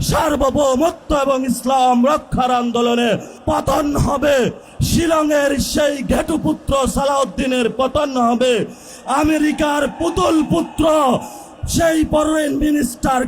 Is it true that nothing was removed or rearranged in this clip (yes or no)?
no